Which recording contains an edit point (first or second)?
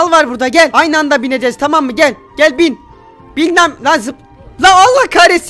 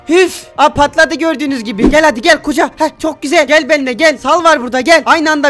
second